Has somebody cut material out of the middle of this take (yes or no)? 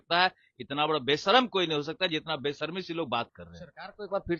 no